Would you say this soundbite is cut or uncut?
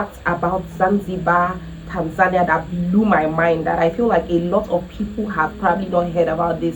uncut